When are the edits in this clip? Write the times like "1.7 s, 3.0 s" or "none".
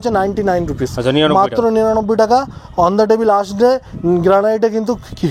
none